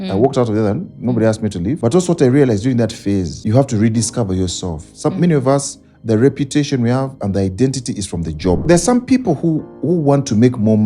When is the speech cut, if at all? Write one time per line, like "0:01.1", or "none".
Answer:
0:01.8
0:03.3
0:08.6